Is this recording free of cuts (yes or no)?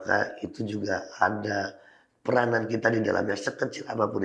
yes